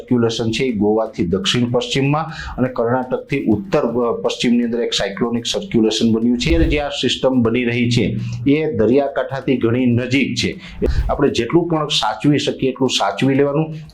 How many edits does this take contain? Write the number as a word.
two